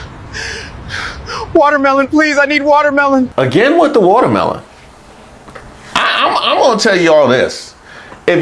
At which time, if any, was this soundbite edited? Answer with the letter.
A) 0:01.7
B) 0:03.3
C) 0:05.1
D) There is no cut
B